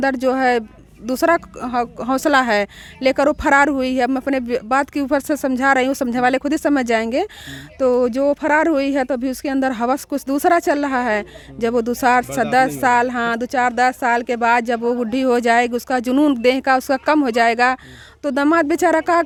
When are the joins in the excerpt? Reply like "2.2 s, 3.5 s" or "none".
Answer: none